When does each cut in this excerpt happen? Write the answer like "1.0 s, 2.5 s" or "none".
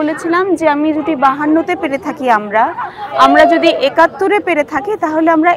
none